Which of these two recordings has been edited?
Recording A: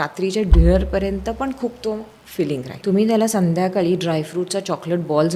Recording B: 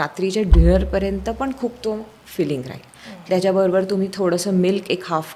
A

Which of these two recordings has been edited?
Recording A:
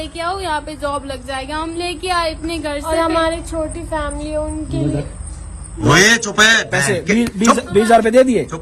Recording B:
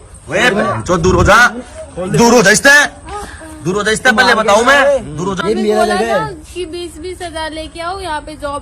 B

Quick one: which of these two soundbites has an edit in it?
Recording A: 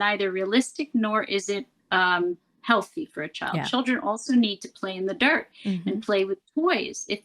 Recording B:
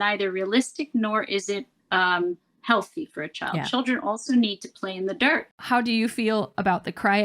B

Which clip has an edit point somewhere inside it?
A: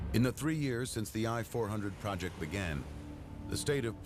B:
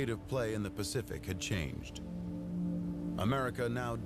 B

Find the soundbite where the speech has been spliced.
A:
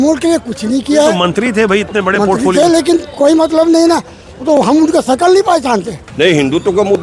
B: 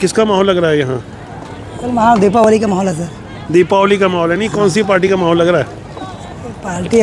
A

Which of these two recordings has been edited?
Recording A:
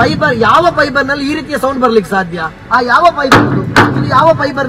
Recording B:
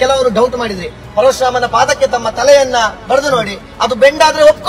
B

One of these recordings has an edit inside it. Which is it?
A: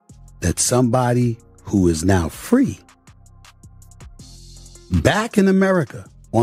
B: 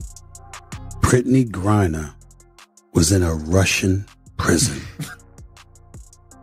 B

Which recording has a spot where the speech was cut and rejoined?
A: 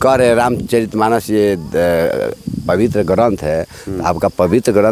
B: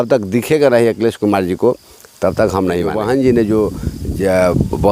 B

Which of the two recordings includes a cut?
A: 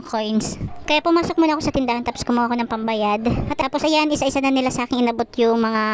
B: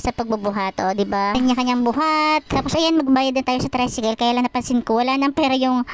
A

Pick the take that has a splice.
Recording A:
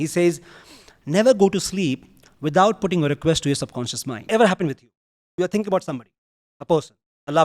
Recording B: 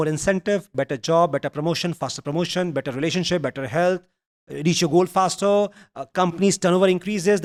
A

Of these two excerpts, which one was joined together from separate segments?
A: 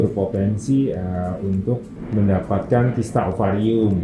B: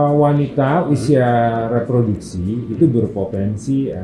A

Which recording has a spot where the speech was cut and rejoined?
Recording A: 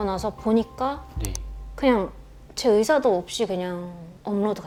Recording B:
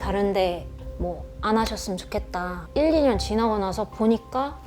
B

